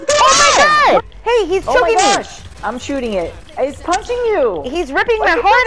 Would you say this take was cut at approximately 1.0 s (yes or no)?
yes